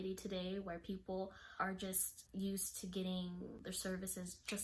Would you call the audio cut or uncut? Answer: cut